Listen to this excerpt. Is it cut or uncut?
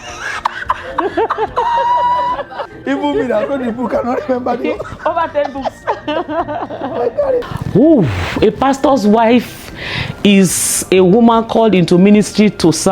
cut